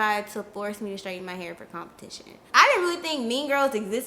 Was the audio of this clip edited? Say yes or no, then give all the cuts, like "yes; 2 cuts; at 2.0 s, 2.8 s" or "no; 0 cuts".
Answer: yes; 1 cut; at 2.4 s